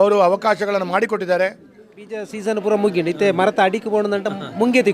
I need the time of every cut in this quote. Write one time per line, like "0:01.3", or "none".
0:02.2